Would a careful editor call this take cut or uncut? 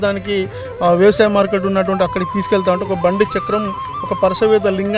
uncut